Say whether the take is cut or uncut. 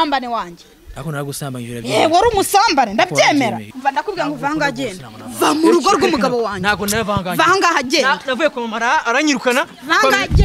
cut